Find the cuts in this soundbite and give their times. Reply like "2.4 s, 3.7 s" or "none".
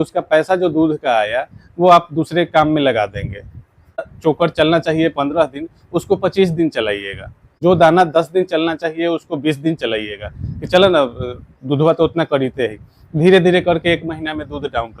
4.1 s, 7.5 s